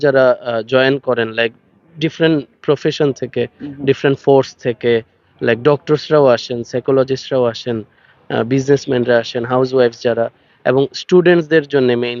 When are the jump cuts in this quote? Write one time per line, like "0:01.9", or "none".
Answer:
none